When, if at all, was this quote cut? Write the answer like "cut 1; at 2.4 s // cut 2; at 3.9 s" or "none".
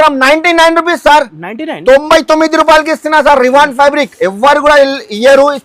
none